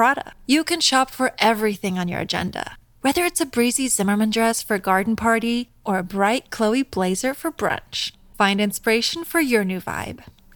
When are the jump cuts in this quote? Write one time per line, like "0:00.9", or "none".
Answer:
none